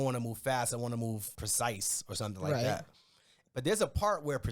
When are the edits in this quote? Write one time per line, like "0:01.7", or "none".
0:01.4